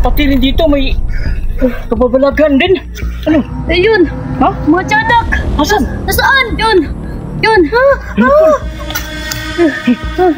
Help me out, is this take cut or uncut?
cut